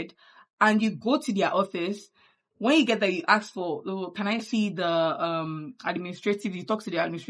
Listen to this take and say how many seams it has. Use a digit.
0